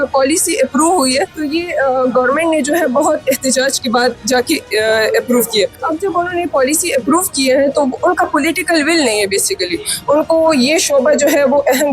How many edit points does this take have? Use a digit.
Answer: 2